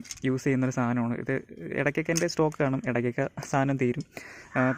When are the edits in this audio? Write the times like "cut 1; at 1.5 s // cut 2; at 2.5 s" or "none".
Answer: none